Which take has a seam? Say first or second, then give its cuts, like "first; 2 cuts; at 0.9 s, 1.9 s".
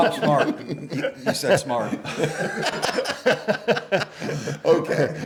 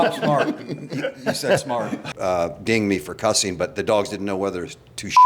second; 1 cut; at 2.1 s